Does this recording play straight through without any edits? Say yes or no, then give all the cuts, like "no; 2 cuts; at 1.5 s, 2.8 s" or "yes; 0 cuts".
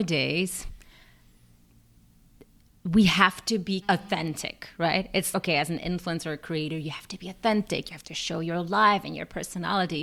yes; 0 cuts